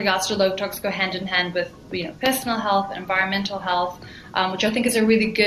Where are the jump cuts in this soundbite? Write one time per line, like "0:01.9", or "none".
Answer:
none